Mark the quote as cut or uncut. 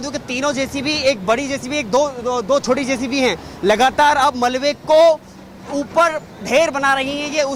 uncut